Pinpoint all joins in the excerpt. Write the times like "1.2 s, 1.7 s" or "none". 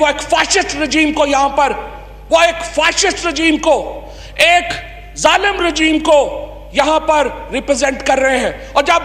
none